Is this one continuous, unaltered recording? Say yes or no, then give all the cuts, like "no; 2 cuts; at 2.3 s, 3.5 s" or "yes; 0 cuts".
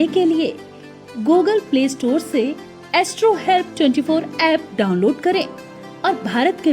no; 1 cut; at 1.3 s